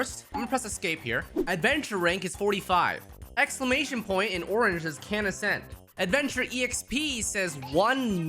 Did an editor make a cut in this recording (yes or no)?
yes